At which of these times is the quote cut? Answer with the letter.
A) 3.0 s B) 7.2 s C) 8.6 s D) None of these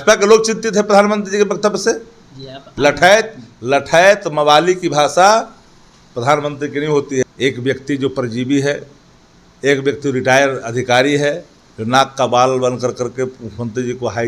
B